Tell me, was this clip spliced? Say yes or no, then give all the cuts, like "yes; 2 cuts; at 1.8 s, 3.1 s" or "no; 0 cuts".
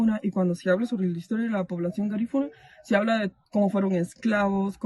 yes; 1 cut; at 3.3 s